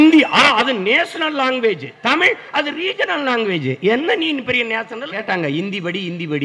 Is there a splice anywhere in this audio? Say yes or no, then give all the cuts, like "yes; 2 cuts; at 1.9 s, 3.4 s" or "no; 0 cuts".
yes; 1 cut; at 5.2 s